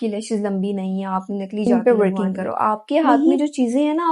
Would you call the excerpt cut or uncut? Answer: cut